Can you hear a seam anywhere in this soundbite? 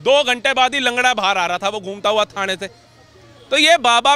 no; 0 cuts

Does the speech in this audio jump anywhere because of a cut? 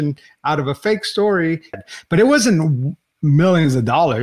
yes; 1 cut; at 1.9 s

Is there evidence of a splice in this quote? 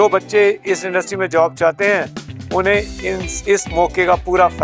no; 0 cuts

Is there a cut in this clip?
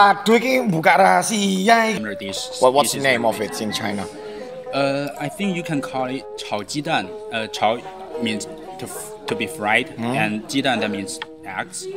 yes; 1 cut; at 1.9 s

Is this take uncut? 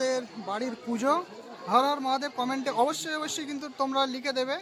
yes; 0 cuts

